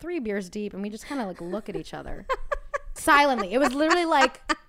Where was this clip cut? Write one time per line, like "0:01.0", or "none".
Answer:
0:03.0